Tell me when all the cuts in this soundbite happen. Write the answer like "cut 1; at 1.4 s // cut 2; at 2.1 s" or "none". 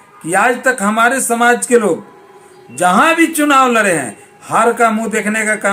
none